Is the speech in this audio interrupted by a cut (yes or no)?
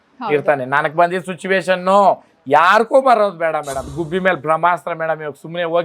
yes